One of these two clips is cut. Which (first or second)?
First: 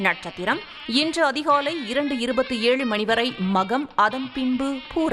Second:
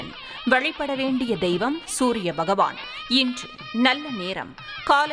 second